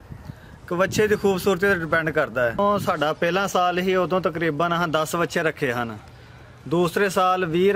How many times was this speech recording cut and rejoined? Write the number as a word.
one